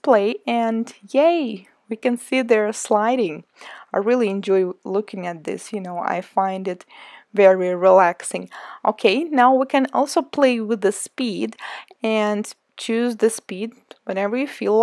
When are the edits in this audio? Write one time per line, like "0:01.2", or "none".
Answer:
0:12.3